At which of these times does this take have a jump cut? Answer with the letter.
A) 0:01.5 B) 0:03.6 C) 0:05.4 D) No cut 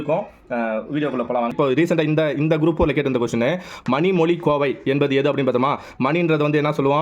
A